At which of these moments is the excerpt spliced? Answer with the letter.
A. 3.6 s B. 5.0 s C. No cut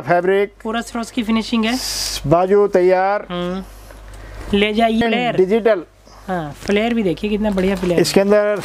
B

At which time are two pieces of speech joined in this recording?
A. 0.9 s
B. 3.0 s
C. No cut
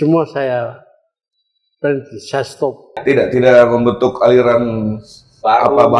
B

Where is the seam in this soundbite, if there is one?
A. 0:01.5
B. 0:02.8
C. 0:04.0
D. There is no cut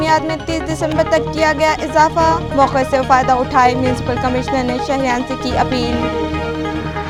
D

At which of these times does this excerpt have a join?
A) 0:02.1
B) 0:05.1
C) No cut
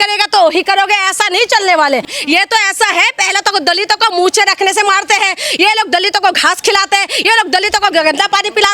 A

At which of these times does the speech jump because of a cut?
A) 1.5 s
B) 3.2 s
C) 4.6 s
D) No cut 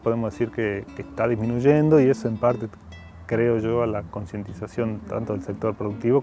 D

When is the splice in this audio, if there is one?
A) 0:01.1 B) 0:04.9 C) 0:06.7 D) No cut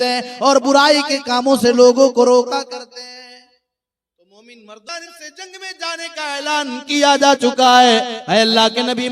B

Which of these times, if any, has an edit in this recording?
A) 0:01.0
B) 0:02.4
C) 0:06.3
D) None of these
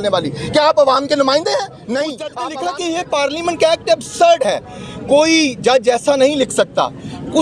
B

